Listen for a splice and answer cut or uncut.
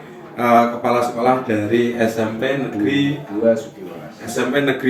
uncut